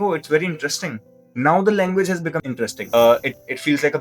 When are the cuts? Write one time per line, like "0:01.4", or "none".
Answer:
0:02.8